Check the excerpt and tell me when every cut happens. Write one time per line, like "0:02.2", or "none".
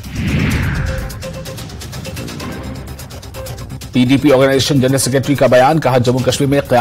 0:02.6